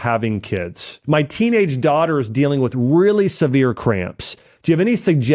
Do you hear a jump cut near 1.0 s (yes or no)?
yes